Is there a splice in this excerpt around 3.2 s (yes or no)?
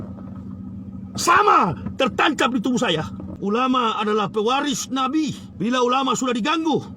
yes